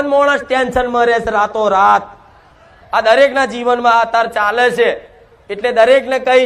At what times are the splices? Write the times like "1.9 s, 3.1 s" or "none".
2.8 s

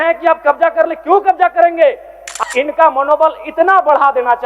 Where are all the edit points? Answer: 2.3 s

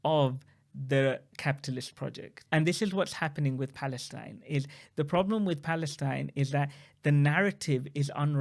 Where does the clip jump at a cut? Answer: 2.3 s

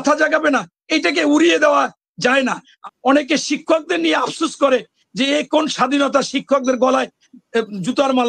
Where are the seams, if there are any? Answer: 2.8 s

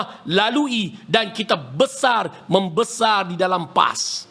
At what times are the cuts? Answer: none

